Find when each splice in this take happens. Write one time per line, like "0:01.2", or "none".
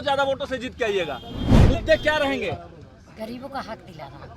0:01.4

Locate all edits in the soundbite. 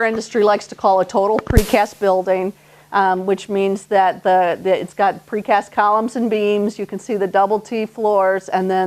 none

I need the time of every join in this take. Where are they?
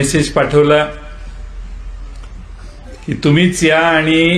none

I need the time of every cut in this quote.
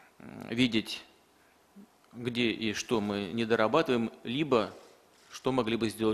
none

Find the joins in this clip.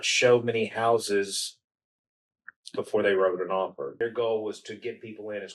0:03.9

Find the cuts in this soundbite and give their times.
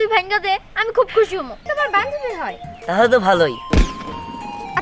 0:01.7

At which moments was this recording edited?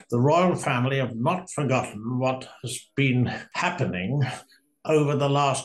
0:03.4

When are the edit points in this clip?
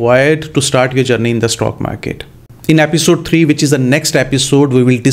none

